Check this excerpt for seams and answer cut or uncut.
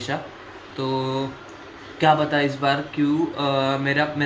uncut